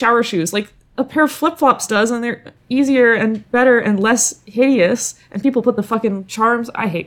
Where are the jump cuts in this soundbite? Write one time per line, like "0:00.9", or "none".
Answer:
none